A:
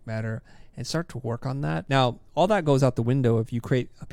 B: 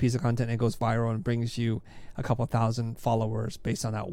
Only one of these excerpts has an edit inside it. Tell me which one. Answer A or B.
A